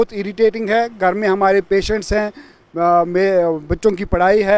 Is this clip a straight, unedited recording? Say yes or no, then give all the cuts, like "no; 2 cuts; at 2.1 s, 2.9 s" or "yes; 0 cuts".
yes; 0 cuts